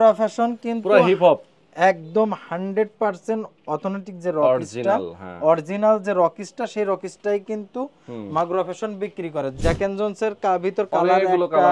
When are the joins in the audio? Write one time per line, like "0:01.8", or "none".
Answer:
0:09.6